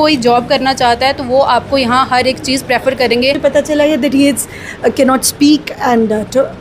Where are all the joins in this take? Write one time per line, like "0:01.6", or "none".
0:03.4